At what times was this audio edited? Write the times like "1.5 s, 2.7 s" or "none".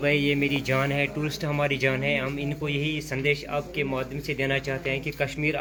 none